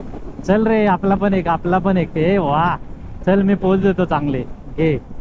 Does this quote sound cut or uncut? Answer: uncut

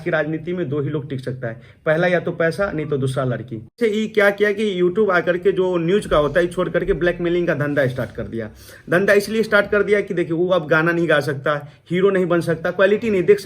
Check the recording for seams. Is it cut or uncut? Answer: cut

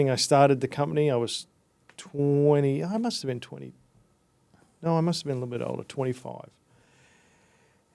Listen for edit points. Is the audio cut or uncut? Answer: uncut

